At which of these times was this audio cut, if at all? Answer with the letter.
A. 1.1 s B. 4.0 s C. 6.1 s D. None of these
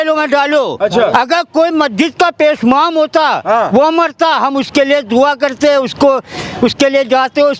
A